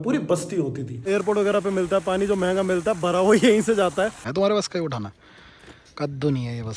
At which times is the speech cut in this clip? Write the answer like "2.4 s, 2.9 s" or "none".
1.0 s, 4.2 s